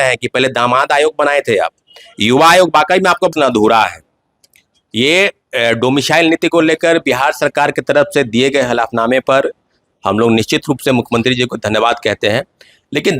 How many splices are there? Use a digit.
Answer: 1